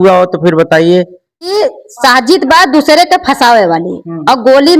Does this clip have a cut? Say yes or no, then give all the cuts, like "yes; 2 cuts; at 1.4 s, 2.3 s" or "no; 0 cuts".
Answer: yes; 1 cut; at 1.5 s